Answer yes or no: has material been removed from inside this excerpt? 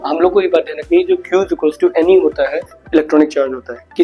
yes